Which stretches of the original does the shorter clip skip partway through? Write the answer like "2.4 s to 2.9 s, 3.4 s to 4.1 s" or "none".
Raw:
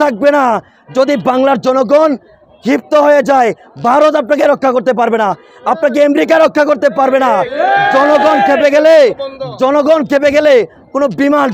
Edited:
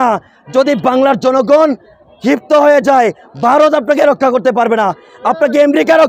none